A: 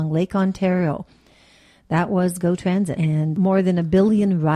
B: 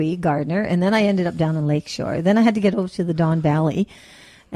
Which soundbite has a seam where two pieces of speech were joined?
A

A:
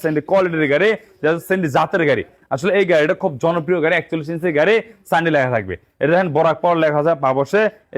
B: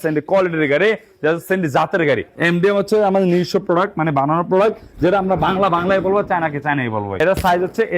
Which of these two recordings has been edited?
B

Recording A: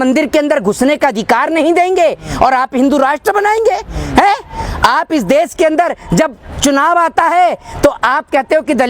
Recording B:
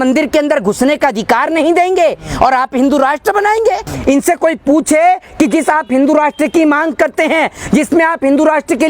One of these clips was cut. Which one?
B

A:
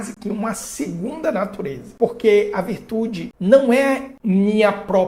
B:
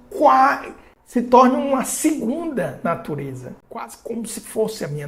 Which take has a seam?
A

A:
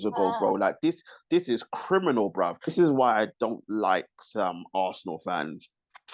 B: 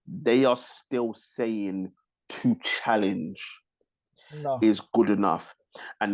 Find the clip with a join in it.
A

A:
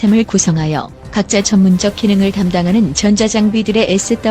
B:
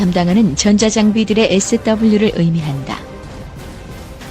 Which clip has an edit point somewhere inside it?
B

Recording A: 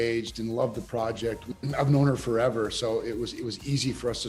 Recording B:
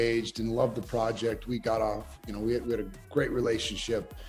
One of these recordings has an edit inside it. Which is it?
A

